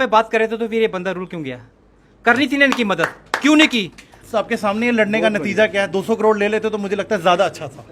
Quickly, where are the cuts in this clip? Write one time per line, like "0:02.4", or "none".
0:04.2